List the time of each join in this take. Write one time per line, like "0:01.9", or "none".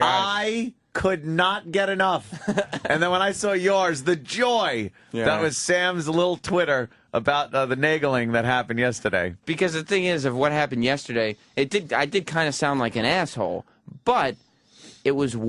0:07.1